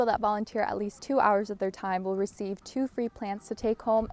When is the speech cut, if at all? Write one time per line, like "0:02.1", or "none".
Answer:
none